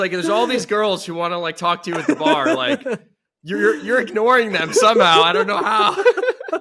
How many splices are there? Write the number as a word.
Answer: zero